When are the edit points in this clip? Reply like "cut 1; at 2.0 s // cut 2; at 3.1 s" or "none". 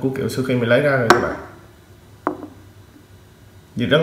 none